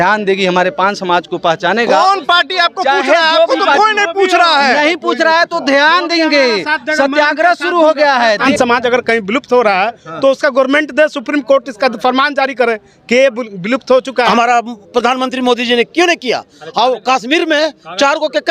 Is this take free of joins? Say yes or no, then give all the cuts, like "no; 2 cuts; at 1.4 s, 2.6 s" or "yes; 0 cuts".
no; 2 cuts; at 8.5 s, 14.3 s